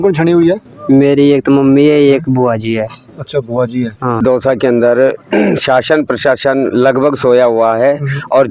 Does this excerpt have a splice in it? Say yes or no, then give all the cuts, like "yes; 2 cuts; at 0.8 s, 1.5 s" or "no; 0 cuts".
yes; 1 cut; at 4.2 s